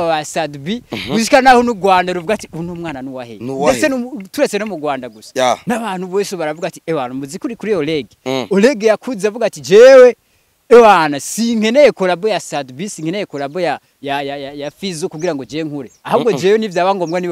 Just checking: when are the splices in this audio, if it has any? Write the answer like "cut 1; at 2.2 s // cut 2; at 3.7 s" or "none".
none

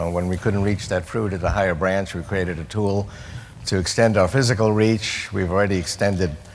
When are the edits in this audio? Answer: none

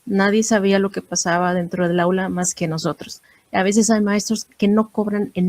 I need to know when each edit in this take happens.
cut 1; at 3.2 s // cut 2; at 4.5 s

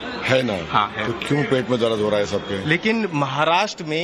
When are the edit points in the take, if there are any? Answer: cut 1; at 1.2 s

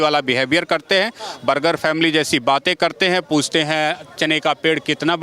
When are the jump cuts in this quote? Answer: none

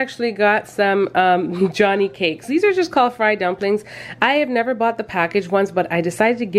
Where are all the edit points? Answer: none

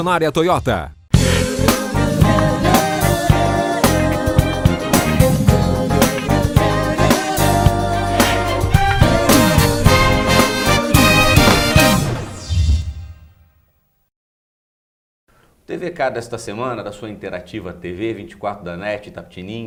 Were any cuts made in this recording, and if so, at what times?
none

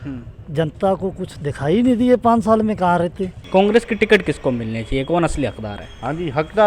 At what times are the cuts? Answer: cut 1; at 3.3 s

